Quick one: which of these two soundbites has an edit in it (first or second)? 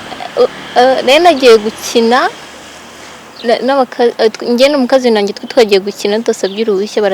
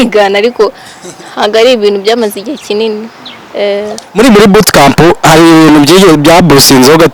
second